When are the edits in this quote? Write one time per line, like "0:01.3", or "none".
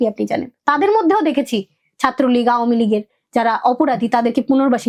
none

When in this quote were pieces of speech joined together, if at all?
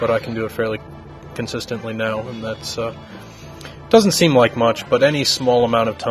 0:04.4

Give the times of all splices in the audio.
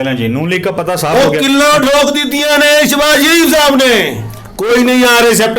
0:04.5

